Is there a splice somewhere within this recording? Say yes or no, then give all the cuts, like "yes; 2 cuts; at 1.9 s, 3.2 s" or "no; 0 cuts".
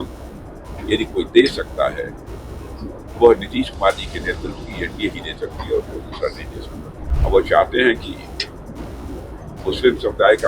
yes; 1 cut; at 7.0 s